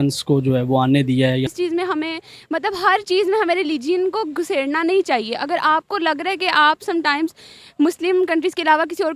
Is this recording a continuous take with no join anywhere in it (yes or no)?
no